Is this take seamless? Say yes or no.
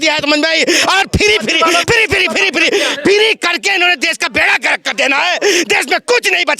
yes